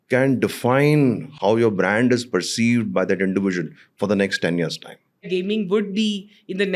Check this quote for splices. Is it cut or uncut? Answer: cut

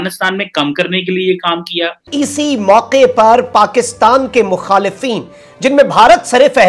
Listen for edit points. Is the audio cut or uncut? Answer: cut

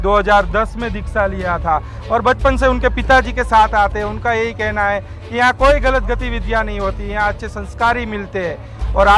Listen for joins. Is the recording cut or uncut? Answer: uncut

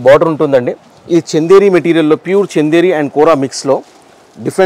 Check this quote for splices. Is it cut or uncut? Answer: uncut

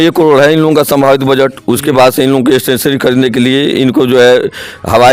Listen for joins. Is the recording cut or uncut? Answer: uncut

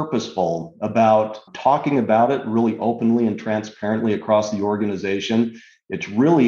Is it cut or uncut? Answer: uncut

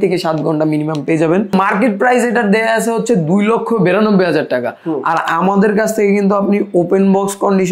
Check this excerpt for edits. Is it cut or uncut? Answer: cut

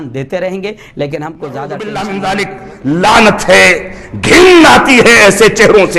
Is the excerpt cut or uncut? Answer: cut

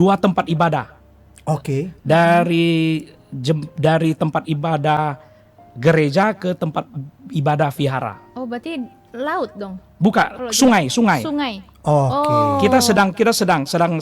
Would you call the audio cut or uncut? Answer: uncut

